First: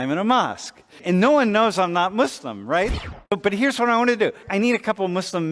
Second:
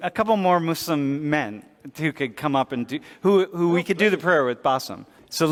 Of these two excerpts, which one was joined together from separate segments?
first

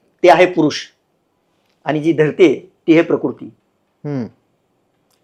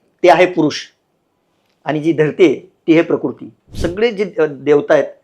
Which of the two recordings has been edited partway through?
second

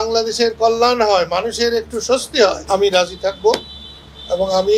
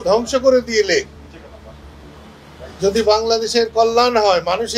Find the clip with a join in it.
first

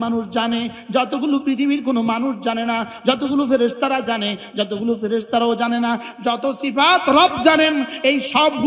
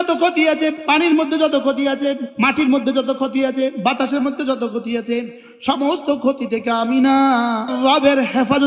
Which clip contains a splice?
second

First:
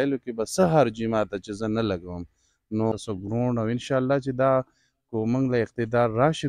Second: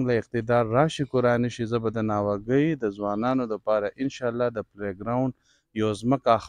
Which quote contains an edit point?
first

